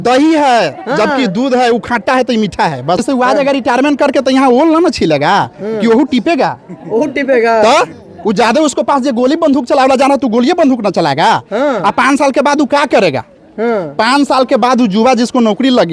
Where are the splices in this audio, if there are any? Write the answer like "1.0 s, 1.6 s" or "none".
3.0 s